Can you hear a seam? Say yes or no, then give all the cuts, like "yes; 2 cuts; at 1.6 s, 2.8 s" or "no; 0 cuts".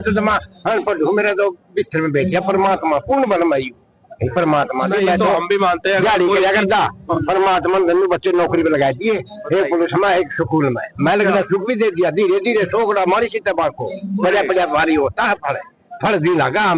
no; 0 cuts